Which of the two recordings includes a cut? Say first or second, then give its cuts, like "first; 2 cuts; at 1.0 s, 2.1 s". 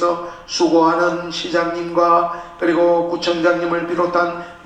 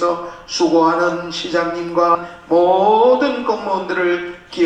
second; 1 cut; at 2.2 s